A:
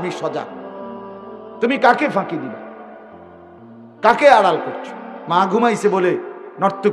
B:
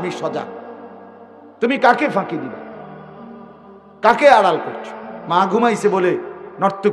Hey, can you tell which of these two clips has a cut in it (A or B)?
B